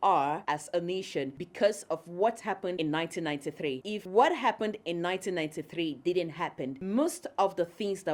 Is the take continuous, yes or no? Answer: no